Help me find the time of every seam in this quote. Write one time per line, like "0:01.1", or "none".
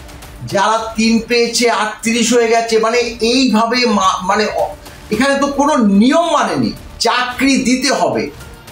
0:06.9